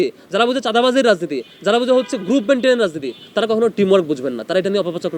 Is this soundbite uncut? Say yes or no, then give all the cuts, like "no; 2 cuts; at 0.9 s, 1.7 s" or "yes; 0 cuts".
yes; 0 cuts